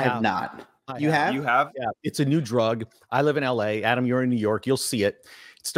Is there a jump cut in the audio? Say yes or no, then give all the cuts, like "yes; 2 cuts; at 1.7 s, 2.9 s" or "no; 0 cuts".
no; 0 cuts